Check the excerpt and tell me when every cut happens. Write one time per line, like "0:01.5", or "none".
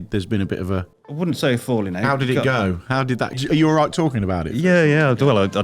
0:01.0
0:03.4